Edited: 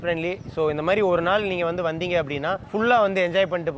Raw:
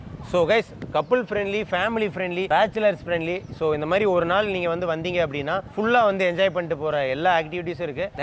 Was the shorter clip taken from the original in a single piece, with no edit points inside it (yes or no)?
yes